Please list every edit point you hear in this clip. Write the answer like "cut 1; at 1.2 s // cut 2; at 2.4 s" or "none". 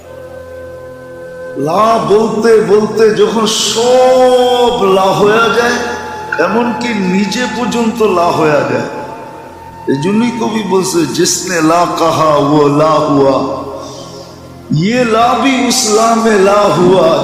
cut 1; at 1.0 s